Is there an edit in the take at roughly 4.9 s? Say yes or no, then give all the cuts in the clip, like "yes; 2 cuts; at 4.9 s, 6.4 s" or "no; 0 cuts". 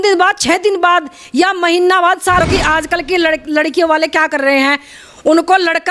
no; 1 cut; at 2.4 s